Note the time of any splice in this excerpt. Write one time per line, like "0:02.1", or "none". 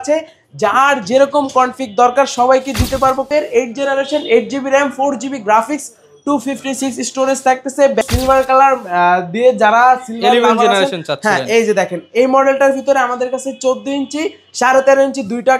0:03.3
0:08.0